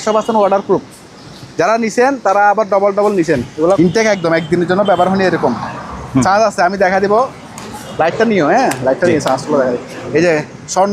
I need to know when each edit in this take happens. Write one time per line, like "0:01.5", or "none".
0:03.8